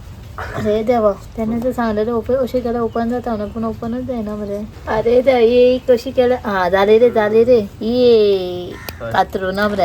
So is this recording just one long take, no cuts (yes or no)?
no